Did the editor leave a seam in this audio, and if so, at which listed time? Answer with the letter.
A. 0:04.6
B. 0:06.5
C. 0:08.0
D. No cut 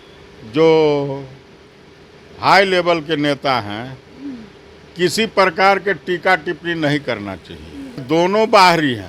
C